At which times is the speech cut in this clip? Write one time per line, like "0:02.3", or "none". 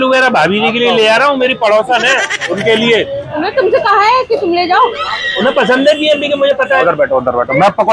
0:02.4
0:03.3
0:05.2
0:06.8